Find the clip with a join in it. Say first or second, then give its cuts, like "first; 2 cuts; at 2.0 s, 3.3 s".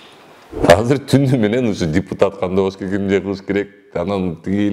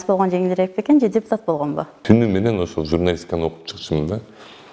second; 1 cut; at 2.0 s